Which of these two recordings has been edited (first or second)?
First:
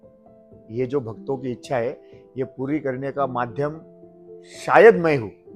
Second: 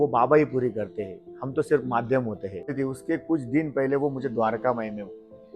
second